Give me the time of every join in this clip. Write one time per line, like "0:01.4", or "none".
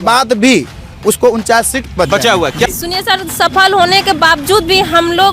0:02.7